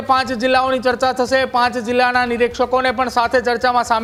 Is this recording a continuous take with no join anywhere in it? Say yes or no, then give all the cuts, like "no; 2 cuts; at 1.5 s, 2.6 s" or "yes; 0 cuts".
yes; 0 cuts